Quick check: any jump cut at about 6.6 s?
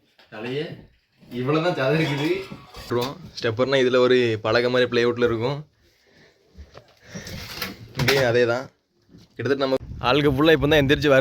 no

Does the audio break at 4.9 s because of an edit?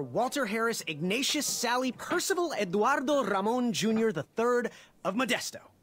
yes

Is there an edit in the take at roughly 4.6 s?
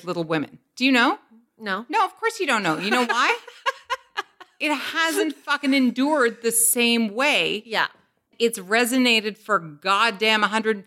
no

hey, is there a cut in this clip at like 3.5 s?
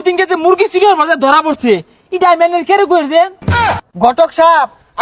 yes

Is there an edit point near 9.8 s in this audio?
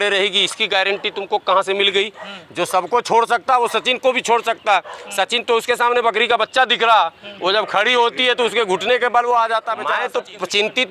yes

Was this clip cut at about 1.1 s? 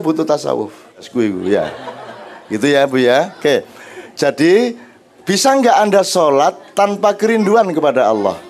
yes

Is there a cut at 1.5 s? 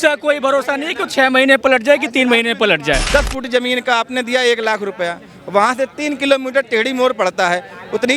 no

